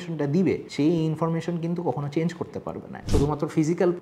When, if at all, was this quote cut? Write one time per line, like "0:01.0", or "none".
0:03.0

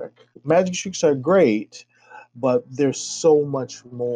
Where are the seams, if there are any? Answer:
none

